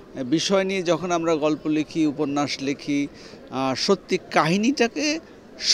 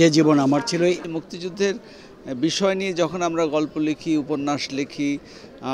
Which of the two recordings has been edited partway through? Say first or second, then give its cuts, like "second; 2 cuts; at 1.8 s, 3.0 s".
second; 1 cut; at 1.0 s